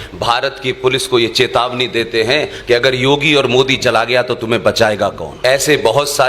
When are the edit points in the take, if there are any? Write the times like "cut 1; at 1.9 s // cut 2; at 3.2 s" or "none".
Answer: cut 1; at 5.3 s